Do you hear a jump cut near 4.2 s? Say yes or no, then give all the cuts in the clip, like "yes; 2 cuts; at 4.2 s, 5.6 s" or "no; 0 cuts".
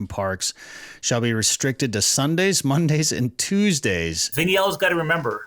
yes; 1 cut; at 4.2 s